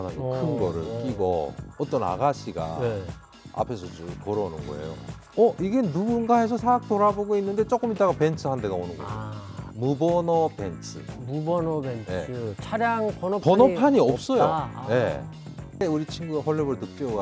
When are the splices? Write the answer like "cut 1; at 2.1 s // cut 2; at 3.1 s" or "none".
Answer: cut 1; at 5.0 s